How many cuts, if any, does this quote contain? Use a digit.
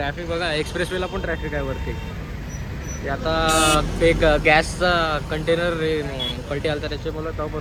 0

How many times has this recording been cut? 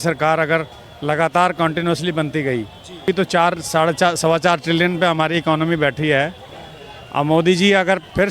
1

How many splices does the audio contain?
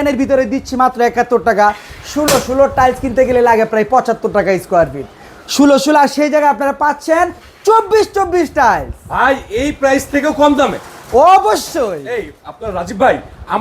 0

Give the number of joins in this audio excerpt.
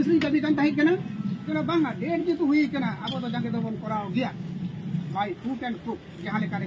1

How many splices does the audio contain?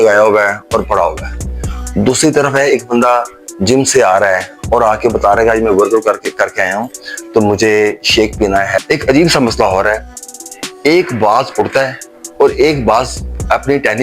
1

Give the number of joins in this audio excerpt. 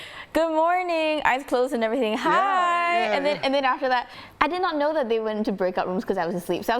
1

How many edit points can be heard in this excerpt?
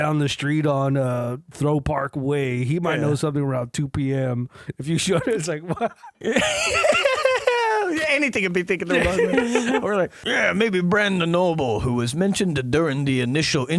2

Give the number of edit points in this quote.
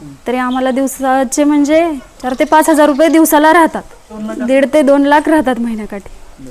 0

